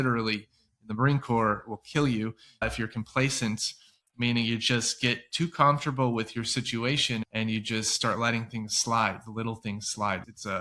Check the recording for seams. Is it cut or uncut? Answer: uncut